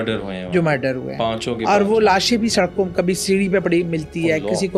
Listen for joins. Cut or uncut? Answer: uncut